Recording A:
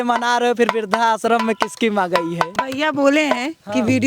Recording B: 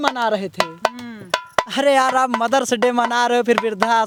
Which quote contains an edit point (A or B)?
A